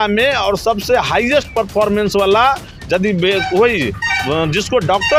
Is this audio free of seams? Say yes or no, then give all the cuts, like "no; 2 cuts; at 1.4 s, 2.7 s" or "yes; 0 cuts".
yes; 0 cuts